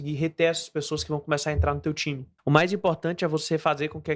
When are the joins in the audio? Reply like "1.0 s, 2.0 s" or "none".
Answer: 2.3 s

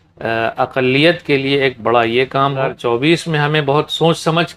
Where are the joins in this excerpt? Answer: 2.7 s

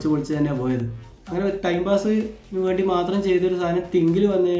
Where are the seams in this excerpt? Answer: 1.2 s

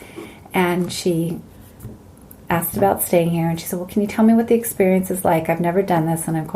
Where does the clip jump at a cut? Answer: none

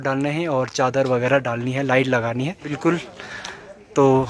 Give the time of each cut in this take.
2.7 s

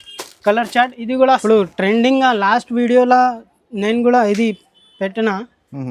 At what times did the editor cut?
1.4 s

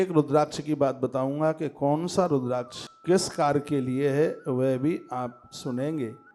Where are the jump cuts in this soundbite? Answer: none

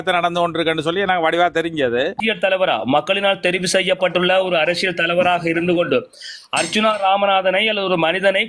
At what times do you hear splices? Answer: 2.2 s

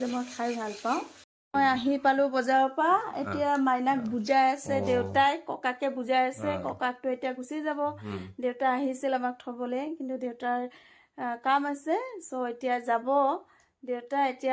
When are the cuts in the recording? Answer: 1.4 s

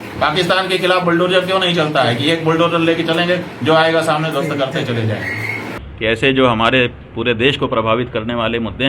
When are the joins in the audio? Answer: 5.9 s

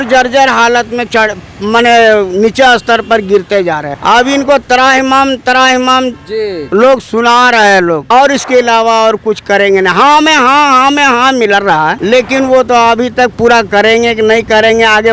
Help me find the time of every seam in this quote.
3.9 s, 8.0 s, 12.0 s

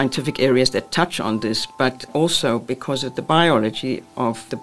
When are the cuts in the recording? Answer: none

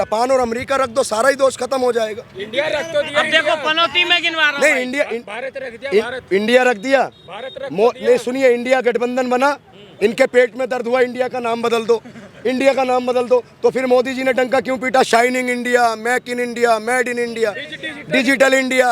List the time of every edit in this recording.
none

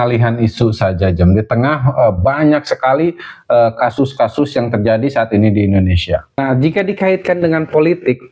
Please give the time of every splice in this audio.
6.4 s

